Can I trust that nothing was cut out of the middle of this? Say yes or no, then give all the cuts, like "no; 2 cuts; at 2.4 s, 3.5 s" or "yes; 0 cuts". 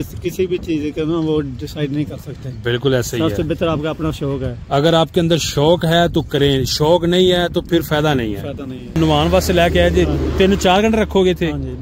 no; 1 cut; at 9.0 s